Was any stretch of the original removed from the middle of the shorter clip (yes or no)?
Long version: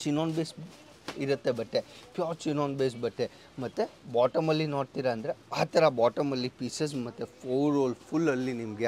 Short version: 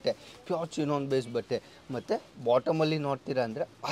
no